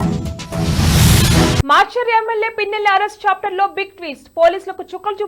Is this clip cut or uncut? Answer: cut